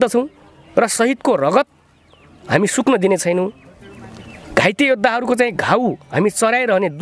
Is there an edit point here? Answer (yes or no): no